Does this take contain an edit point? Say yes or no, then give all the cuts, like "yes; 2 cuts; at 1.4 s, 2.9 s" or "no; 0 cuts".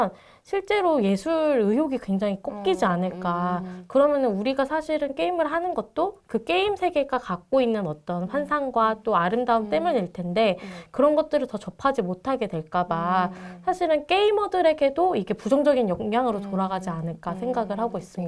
no; 0 cuts